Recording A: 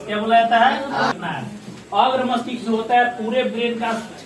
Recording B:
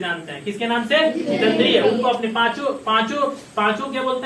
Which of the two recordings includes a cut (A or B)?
A